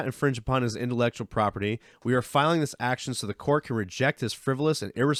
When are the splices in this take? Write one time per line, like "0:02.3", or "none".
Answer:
none

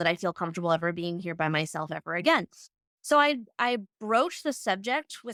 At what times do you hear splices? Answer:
none

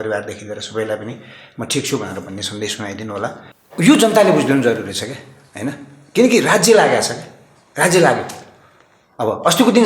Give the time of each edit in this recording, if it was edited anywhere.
0:03.5

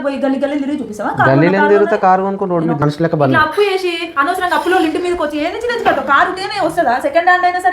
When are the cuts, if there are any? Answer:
0:02.8

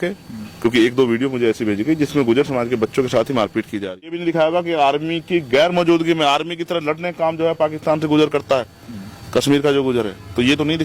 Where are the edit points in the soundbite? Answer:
0:04.2

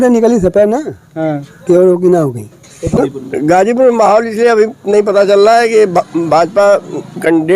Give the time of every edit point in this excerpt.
0:03.0

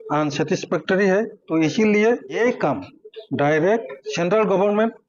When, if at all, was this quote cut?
0:01.4
0:02.4
0:04.0

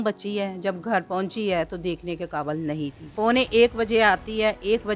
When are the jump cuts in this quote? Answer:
0:03.0

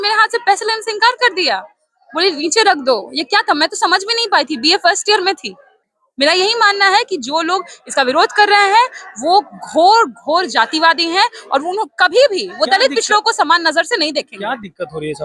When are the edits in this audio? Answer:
0:05.9

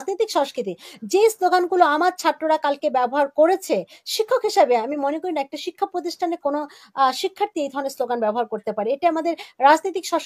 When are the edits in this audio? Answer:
none

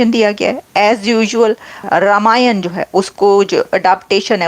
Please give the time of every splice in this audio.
0:01.7

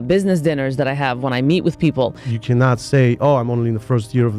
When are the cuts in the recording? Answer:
0:02.3

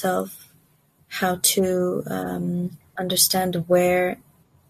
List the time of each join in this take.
0:03.0

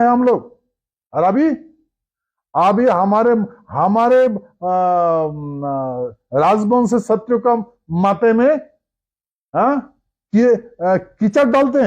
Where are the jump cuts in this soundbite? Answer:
none

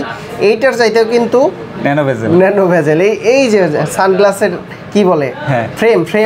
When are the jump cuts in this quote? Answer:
none

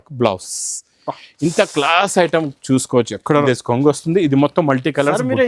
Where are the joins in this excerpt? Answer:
0:03.4

